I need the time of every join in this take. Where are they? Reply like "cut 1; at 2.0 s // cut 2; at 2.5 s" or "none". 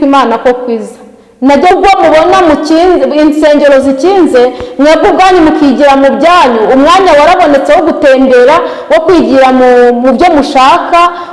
cut 1; at 1.7 s